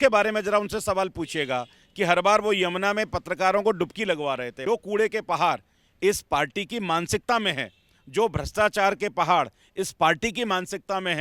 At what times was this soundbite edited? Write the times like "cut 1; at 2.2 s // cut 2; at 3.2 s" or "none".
cut 1; at 4.6 s